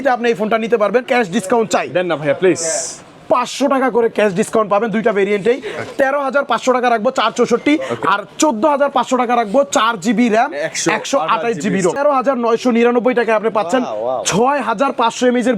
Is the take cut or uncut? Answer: cut